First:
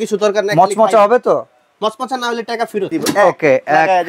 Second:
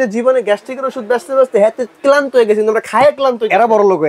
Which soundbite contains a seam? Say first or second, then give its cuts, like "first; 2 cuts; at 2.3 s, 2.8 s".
first; 1 cut; at 3.0 s